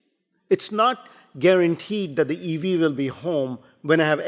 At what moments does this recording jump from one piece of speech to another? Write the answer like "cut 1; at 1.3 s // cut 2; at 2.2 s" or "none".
none